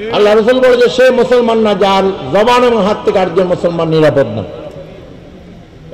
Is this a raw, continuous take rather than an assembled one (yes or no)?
yes